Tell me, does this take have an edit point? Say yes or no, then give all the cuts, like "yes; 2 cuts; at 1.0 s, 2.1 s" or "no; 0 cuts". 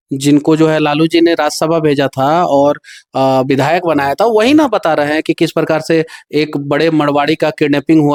no; 0 cuts